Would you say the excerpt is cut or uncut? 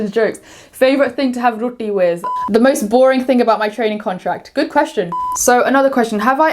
cut